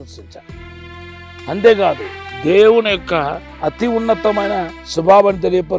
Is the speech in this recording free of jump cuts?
no; 2 cuts; at 3.4 s, 4.8 s

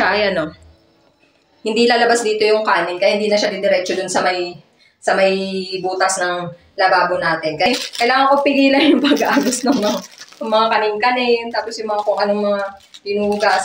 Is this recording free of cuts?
no; 1 cut; at 7.7 s

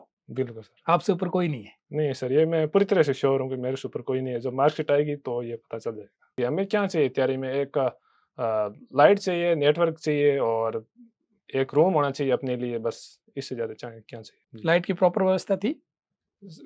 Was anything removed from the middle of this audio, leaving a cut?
yes; 1 cut; at 6.4 s

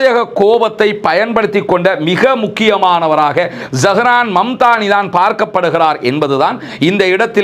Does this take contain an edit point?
no; 0 cuts

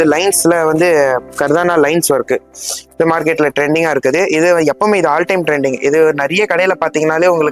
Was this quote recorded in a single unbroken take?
yes; 0 cuts

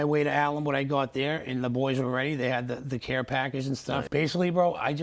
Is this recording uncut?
yes; 0 cuts

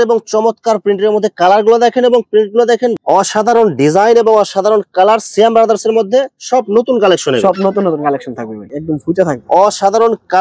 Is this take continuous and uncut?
no; 2 cuts; at 3.0 s, 8.6 s

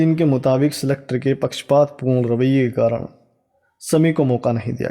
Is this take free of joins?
yes; 0 cuts

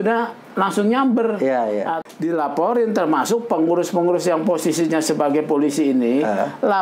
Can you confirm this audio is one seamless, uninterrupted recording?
no; 1 cut; at 2.0 s

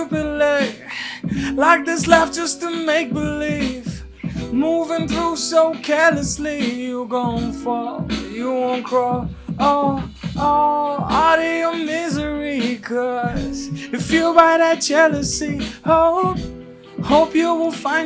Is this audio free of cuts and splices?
yes; 0 cuts

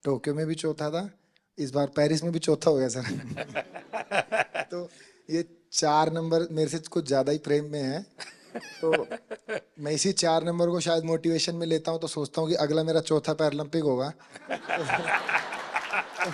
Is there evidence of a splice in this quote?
no; 0 cuts

